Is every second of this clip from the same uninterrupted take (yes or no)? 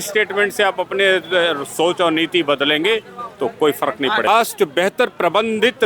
no